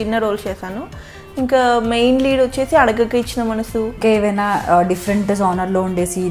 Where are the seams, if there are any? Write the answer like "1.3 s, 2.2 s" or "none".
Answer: 4.0 s